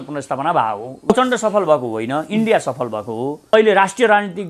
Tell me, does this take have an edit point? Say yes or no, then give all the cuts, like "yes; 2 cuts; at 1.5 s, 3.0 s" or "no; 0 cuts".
yes; 2 cuts; at 1.1 s, 3.5 s